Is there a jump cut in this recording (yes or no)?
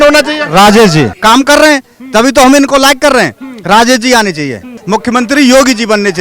yes